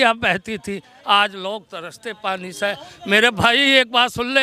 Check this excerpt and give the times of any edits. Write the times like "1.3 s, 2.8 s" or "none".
none